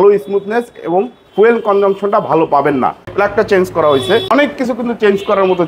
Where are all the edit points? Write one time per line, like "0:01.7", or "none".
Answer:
0:03.1
0:04.3